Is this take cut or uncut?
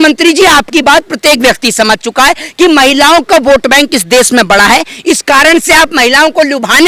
uncut